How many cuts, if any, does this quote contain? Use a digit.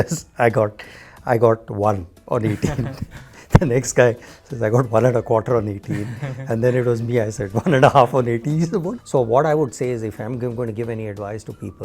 1